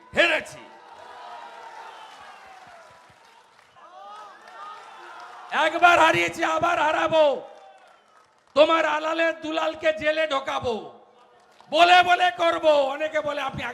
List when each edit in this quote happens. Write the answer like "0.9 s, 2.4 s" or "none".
3.8 s